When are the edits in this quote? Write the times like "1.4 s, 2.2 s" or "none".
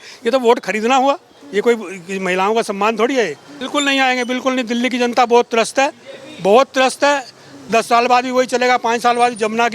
3.6 s, 7.7 s